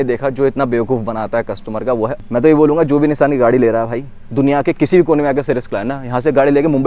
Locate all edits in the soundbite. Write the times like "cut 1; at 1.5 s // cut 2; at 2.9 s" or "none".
cut 1; at 2.2 s